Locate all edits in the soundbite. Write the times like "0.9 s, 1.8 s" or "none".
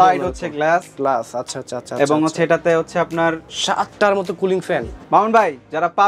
3.5 s, 4.9 s